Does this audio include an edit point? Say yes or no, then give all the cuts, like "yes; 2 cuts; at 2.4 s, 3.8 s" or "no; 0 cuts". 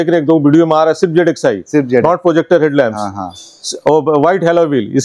no; 0 cuts